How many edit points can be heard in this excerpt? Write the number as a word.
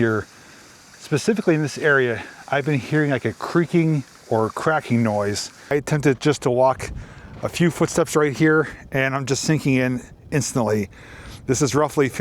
one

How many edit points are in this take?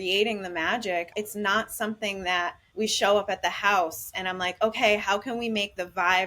two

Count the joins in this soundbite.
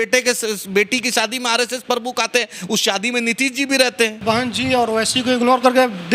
one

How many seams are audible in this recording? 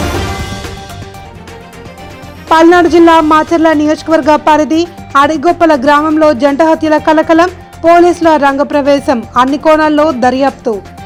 zero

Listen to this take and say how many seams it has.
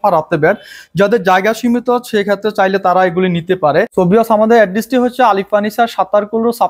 one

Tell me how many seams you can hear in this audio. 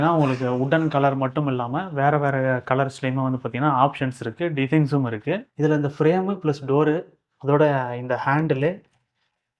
one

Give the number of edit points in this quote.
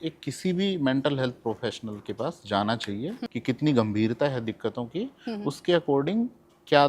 one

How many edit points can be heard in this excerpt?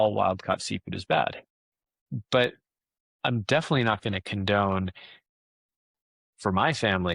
one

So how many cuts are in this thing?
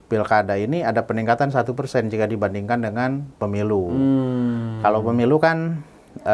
zero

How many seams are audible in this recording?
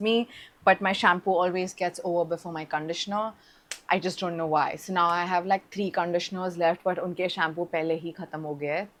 zero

